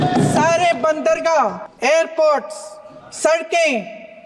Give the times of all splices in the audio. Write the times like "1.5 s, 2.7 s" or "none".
1.7 s